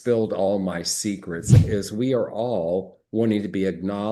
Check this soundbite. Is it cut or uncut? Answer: cut